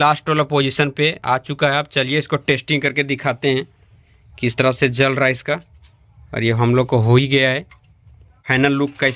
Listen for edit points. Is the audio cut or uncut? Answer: uncut